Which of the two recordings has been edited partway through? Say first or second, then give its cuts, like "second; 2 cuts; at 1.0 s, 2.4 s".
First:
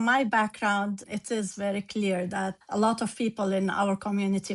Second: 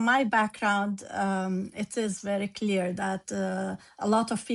first; 2 cuts; at 1.0 s, 2.6 s